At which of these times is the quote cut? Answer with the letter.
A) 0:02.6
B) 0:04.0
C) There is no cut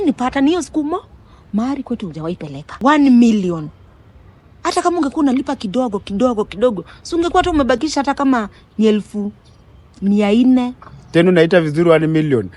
A